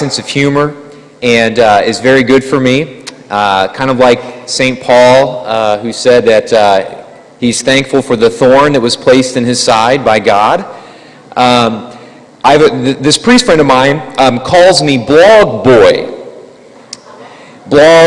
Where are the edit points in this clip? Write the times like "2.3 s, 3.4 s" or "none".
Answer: 5.2 s